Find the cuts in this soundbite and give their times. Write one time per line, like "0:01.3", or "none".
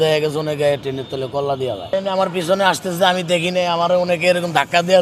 0:01.9